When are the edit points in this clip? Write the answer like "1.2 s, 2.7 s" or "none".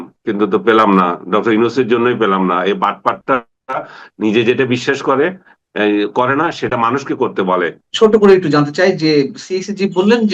7.8 s